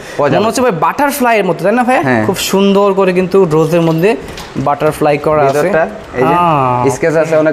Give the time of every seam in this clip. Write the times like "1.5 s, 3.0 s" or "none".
none